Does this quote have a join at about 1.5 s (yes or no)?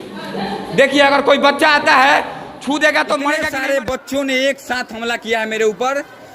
no